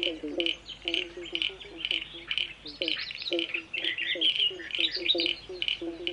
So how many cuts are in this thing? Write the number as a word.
one